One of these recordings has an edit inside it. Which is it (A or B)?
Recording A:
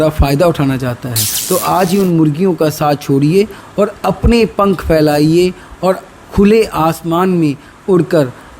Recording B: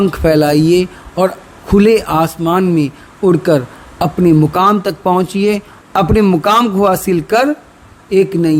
A